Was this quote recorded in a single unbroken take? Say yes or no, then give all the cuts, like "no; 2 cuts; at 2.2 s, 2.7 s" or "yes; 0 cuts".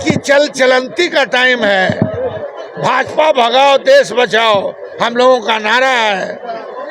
yes; 0 cuts